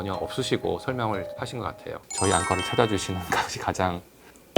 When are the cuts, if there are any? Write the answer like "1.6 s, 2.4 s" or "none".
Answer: 2.0 s

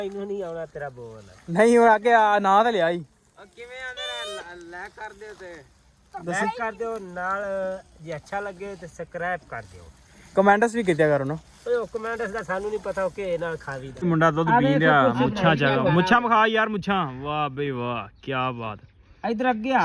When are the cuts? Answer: 13.9 s

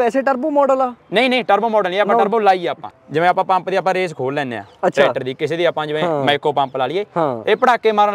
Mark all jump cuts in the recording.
2.9 s

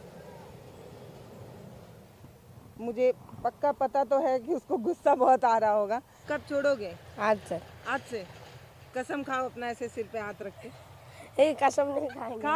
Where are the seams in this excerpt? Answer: 6.1 s

